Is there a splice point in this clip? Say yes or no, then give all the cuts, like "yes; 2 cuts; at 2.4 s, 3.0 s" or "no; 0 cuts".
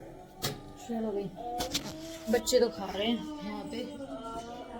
no; 0 cuts